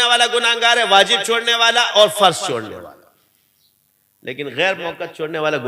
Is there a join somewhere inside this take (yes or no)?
no